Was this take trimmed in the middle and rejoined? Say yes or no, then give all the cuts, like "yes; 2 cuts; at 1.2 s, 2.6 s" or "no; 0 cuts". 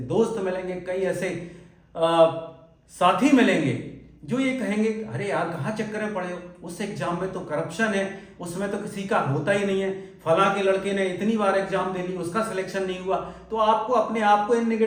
no; 0 cuts